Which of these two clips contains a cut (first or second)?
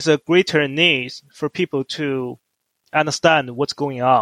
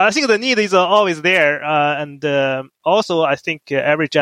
second